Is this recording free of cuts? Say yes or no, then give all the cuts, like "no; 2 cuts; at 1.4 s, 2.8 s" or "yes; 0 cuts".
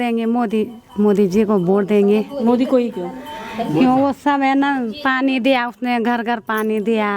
yes; 0 cuts